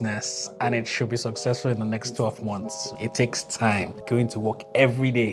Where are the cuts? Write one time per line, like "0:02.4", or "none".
0:02.9
0:04.0

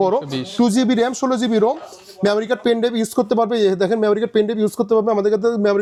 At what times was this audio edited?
none

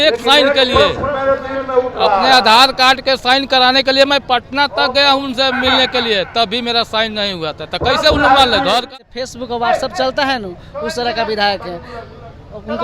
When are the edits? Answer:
0:08.9

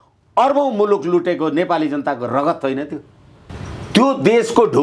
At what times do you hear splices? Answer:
none

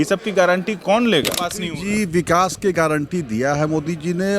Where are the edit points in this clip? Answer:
0:01.6

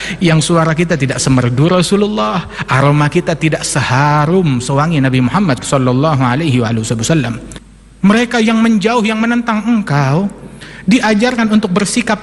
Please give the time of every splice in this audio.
none

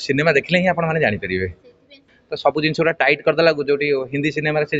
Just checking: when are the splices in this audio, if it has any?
0:02.1

